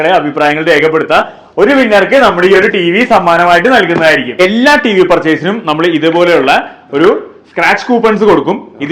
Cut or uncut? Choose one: cut